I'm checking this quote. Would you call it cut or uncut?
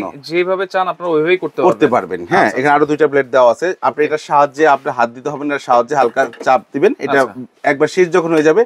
uncut